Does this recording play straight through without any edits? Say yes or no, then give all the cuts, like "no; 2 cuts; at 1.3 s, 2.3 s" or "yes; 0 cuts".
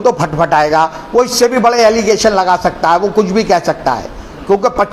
yes; 0 cuts